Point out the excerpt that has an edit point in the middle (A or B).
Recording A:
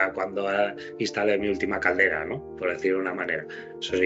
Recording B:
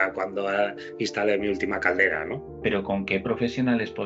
B